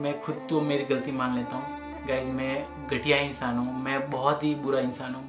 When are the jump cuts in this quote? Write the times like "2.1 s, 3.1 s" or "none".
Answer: none